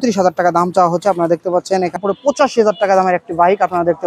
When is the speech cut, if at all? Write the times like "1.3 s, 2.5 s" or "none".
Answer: 2.0 s